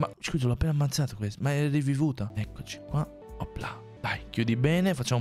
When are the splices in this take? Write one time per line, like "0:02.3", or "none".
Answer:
0:02.2